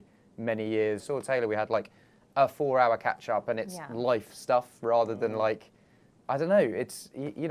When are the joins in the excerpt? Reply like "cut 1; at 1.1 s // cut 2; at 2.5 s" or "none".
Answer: cut 1; at 1.0 s